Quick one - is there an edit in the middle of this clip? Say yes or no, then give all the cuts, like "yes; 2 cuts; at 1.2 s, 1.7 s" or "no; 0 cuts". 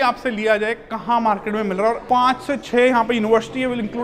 yes; 1 cut; at 2.0 s